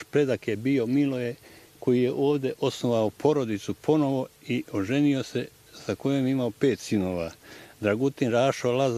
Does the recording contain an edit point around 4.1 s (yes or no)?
no